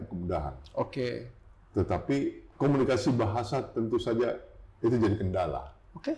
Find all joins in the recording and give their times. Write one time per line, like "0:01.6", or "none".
0:02.4